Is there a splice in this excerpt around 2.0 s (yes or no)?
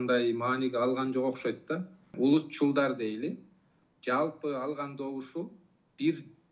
yes